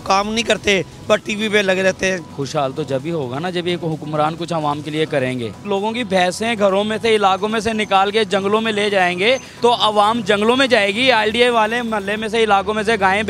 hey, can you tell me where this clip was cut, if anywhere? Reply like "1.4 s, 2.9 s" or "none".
2.3 s, 5.6 s, 9.5 s